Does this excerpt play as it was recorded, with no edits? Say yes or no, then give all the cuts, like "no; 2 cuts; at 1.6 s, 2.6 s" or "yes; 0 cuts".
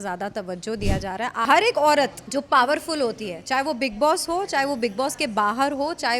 no; 2 cuts; at 1.5 s, 2.2 s